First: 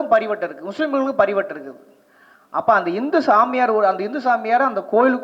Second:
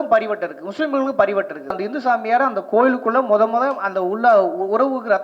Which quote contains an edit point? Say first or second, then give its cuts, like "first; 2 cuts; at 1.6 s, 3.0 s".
second; 1 cut; at 1.8 s